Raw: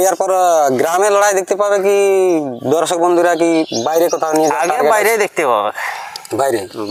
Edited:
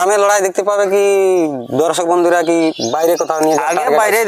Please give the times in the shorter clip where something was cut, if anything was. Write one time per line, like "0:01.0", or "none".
none